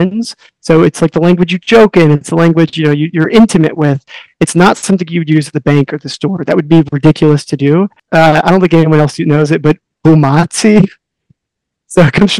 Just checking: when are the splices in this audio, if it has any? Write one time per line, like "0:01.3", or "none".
0:08.0

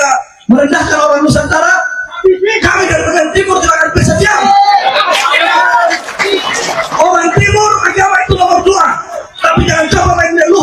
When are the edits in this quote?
none

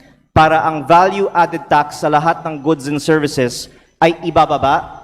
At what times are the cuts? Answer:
none

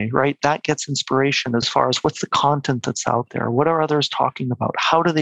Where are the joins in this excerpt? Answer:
0:01.7

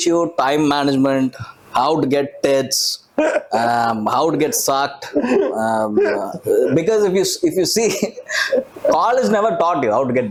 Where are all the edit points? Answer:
none

